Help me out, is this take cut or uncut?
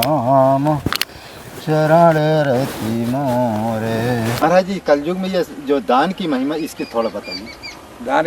cut